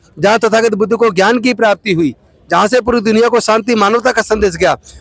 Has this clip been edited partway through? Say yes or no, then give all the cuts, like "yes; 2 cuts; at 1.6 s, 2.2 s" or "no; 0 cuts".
no; 0 cuts